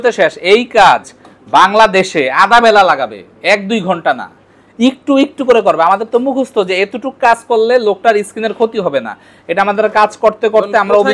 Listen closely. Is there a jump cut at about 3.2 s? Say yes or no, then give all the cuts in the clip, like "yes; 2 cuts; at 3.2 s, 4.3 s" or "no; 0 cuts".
no; 0 cuts